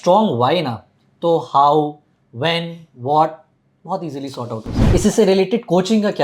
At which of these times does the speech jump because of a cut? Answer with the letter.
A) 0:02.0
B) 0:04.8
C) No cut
B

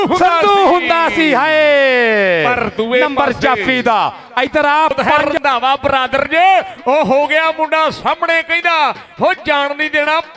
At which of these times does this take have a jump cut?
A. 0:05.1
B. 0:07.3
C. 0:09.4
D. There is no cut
A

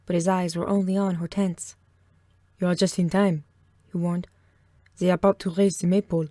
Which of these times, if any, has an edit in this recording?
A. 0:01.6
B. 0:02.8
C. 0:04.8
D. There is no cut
A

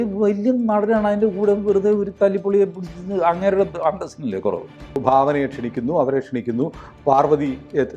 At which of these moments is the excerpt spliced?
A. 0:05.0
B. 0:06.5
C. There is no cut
A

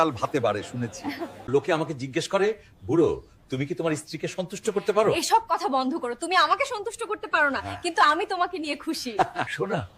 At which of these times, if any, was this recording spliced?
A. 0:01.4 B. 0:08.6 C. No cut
A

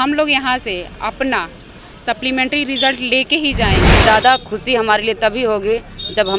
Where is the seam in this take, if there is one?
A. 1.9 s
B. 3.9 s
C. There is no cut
B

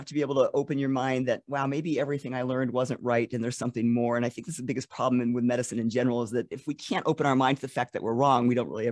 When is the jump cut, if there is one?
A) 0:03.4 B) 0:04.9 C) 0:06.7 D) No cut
C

